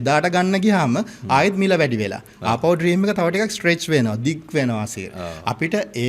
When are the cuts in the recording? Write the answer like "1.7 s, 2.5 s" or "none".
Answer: none